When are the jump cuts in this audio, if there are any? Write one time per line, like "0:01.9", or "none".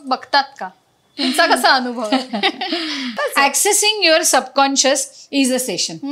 0:03.2